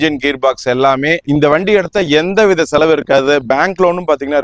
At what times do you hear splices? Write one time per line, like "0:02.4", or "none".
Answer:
0:01.2